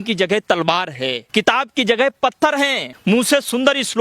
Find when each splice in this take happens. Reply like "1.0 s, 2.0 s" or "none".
1.2 s, 2.9 s

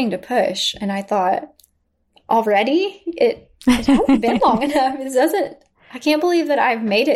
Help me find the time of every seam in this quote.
none

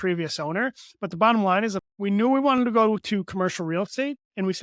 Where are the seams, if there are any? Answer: 1.9 s

